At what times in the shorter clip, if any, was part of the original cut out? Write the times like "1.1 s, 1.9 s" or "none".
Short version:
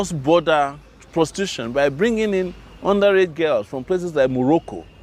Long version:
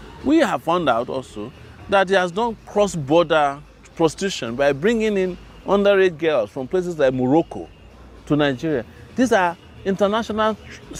none